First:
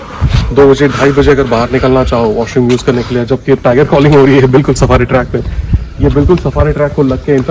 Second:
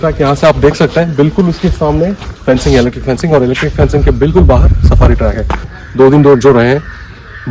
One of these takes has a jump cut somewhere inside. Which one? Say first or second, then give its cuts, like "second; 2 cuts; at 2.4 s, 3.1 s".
second; 1 cut; at 5.8 s